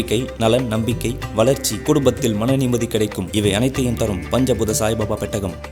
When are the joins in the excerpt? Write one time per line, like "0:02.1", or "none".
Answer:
none